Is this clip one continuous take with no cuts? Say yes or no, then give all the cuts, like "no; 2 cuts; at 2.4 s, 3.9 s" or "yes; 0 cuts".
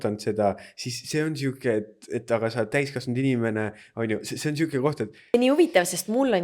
no; 1 cut; at 5.3 s